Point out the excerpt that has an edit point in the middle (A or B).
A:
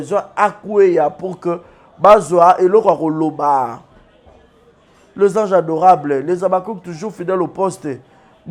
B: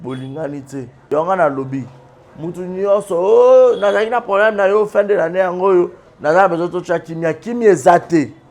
B